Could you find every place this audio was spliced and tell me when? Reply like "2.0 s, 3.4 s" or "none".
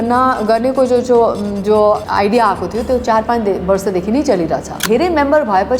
2.0 s, 4.8 s